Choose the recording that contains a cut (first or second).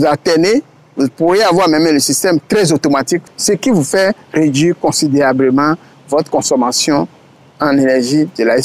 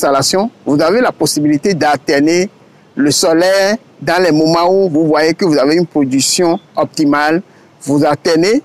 first